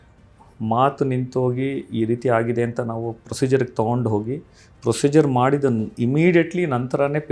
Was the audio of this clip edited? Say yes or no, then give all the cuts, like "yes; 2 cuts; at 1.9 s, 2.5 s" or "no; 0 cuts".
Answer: no; 0 cuts